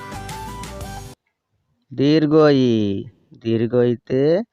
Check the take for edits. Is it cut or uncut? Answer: cut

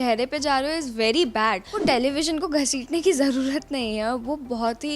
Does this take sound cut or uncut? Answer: cut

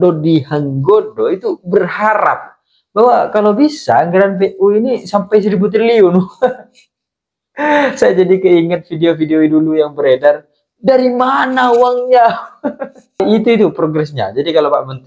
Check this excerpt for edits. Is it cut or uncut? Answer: cut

